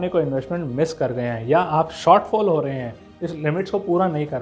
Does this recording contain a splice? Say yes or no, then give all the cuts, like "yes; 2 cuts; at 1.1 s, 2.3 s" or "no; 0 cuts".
no; 0 cuts